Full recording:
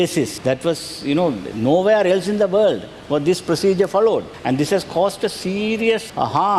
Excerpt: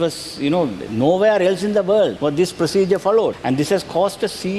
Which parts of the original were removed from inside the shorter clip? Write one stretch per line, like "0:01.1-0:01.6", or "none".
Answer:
0:02.8-0:03.0
0:04.3-0:04.4

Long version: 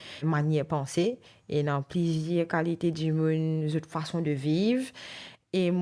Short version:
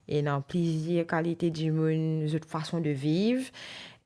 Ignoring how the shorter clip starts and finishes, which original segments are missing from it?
none

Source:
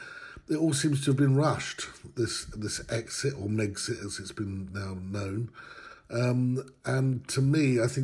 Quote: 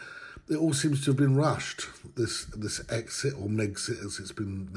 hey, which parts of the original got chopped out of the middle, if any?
none

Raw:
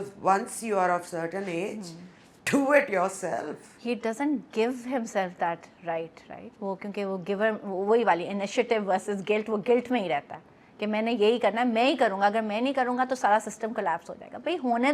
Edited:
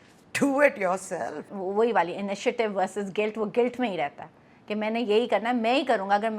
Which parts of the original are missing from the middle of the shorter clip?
0:03.6-0:07.6

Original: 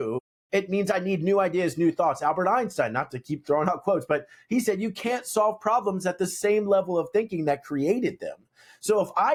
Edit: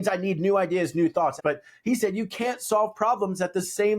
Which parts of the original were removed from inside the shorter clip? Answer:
0:02.2-0:04.0

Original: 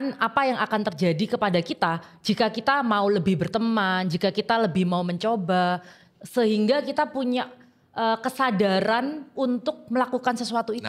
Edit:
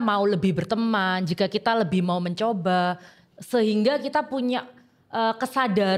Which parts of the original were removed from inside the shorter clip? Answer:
none

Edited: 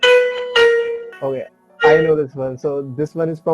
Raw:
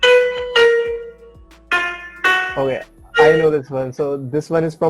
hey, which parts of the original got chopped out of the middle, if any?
0:01.1-0:02.5

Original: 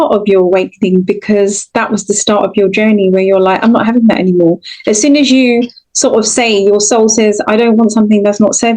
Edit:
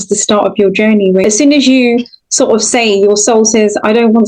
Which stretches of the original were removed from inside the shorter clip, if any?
0:03.2-0:04.9

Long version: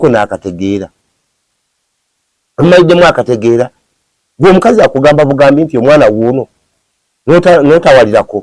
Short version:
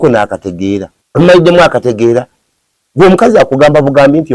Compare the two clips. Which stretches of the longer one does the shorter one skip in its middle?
0:01.0-0:02.4

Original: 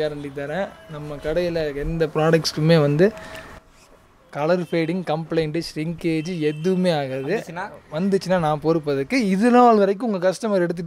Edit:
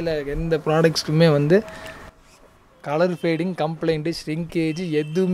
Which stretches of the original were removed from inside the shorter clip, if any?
none

